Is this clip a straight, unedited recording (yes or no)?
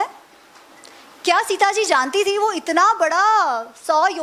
yes